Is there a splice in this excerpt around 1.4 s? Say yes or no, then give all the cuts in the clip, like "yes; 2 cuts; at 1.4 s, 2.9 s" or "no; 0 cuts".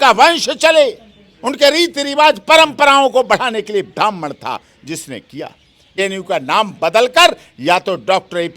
no; 1 cut; at 6.0 s